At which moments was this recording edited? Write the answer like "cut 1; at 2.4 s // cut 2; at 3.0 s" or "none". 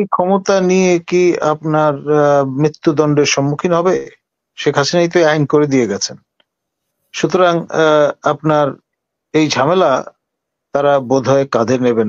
none